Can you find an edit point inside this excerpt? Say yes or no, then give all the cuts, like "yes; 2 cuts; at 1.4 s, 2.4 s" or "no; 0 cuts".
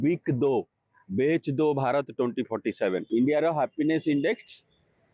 yes; 1 cut; at 3.0 s